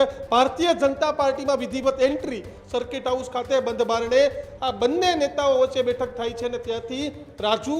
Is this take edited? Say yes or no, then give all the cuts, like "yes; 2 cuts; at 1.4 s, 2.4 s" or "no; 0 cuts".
yes; 1 cut; at 2.5 s